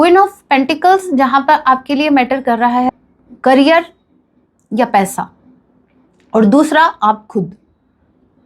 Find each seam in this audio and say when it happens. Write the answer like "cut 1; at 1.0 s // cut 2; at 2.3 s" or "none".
cut 1; at 2.9 s